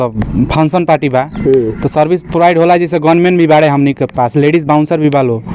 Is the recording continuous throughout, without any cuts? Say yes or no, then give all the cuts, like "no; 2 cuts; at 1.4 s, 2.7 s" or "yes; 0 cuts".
yes; 0 cuts